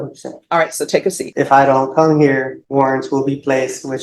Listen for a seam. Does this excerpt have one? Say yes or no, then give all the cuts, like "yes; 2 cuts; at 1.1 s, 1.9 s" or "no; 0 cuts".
yes; 2 cuts; at 1.2 s, 2.6 s